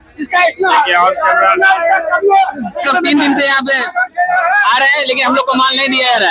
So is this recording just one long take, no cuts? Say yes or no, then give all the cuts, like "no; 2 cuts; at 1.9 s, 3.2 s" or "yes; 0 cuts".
no; 1 cut; at 2.9 s